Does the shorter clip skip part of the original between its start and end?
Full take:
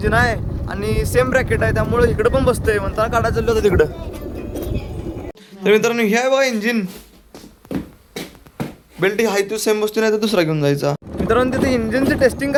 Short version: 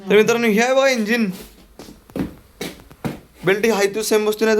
no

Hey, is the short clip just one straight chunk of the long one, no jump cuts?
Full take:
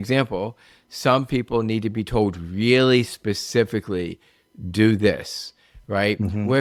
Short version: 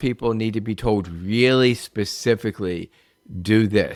yes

